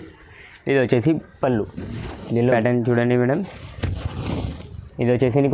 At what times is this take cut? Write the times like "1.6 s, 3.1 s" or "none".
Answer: 2.4 s